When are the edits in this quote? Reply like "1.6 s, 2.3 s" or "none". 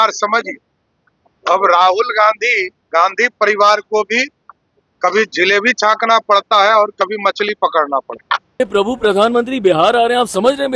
8.6 s

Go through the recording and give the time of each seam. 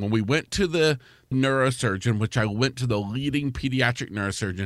1.3 s

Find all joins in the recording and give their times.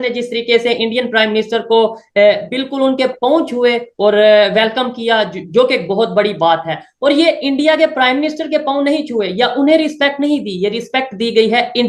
none

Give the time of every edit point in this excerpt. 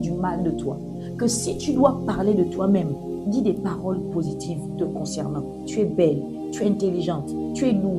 none

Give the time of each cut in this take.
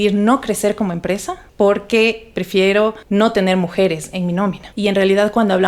1.4 s, 3.0 s, 4.7 s

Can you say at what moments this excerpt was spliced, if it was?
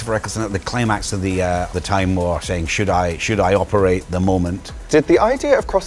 1.7 s, 4.6 s

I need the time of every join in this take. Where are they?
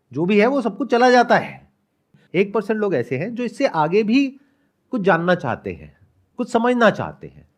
2.1 s

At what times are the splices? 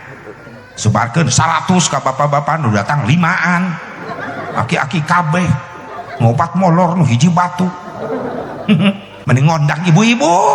9.1 s

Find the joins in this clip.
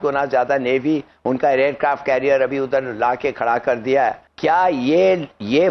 4.3 s

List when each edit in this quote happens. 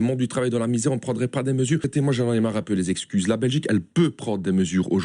1.9 s

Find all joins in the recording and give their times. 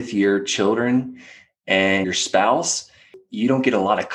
2.0 s, 3.2 s

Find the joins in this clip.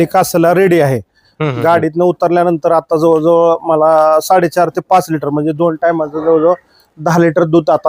none

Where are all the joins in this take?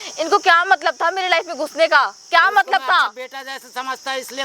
none

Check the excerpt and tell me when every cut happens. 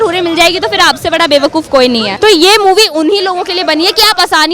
2.1 s

